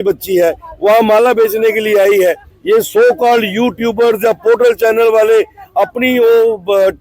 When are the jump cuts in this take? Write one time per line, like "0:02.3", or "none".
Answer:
0:02.5